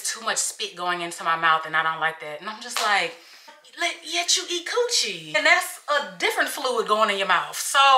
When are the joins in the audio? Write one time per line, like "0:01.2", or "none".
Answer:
0:03.6
0:05.2